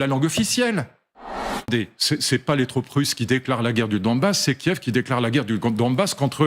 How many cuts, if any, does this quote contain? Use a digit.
1